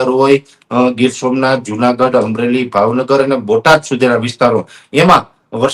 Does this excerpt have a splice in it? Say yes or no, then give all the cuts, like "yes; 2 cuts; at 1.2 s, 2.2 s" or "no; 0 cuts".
no; 0 cuts